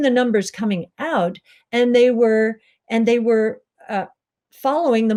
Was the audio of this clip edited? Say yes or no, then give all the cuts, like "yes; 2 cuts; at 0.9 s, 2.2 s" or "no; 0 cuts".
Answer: no; 0 cuts